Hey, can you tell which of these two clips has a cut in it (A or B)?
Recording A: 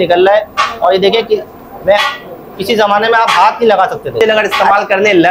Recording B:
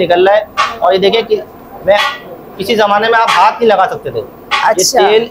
A